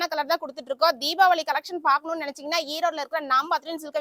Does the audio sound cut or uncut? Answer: uncut